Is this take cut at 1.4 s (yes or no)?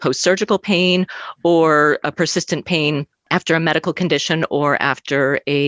no